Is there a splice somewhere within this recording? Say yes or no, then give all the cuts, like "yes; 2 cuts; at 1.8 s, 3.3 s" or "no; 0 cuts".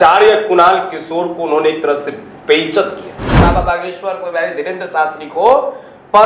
yes; 1 cut; at 3.3 s